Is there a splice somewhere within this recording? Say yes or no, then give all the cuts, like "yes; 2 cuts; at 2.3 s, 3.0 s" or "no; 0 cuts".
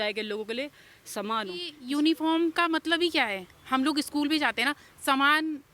yes; 1 cut; at 1.8 s